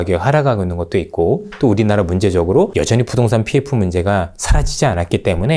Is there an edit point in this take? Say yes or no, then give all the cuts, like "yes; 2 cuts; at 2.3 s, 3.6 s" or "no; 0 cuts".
no; 0 cuts